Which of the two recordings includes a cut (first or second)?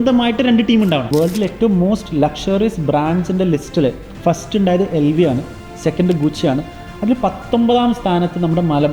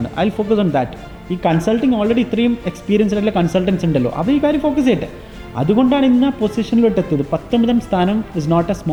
first